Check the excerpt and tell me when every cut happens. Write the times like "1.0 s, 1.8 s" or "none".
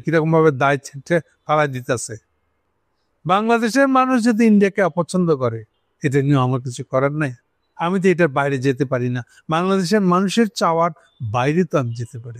none